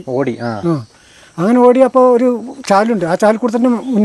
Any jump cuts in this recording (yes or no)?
no